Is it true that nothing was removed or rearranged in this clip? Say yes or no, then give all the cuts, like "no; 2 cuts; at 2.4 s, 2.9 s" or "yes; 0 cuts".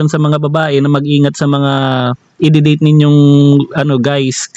yes; 0 cuts